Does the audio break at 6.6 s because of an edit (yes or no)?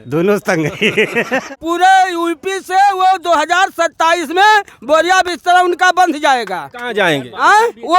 no